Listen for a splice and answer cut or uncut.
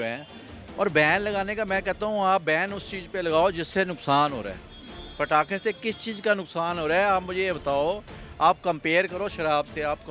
uncut